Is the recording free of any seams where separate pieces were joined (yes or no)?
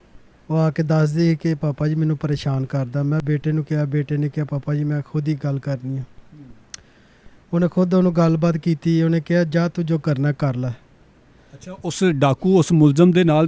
yes